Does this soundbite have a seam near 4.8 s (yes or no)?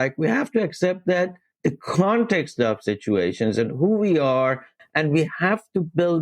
yes